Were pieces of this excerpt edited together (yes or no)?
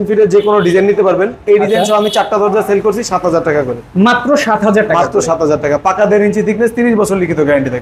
no